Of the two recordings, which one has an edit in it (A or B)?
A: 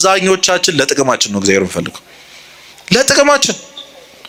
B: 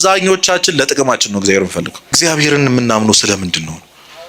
B